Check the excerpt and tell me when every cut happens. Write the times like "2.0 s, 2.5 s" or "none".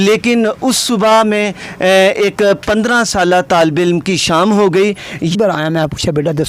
5.3 s